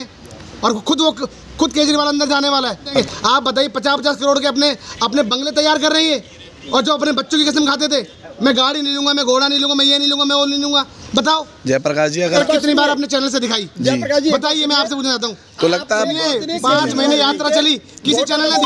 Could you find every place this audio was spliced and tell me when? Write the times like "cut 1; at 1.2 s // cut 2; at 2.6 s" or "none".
cut 1; at 3.0 s // cut 2; at 12.3 s